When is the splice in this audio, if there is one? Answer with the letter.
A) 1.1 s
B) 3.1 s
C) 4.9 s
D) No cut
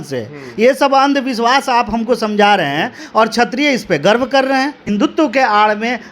C